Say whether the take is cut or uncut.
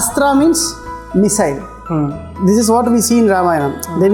uncut